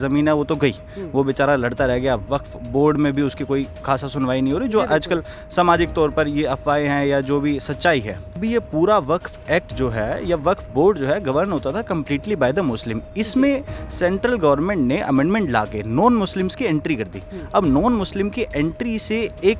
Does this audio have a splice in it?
yes; 1 cut; at 8.4 s

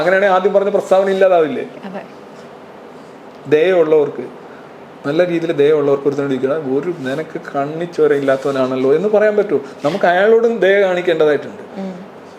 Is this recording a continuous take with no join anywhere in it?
yes; 0 cuts

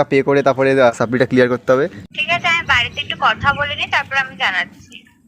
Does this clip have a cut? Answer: yes; 2 cuts; at 0.9 s, 2.0 s

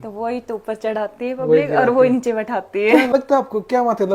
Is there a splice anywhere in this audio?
yes; 1 cut; at 3.1 s

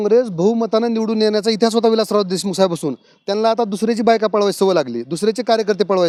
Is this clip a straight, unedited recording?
yes; 0 cuts

